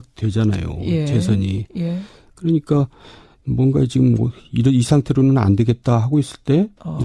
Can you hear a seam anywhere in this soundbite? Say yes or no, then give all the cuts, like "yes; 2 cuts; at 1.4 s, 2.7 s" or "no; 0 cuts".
no; 0 cuts